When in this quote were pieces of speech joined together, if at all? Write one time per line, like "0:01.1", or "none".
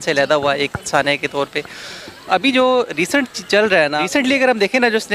0:04.0